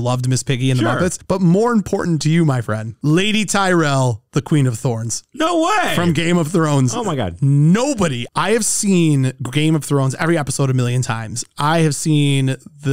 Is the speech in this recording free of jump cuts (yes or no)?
yes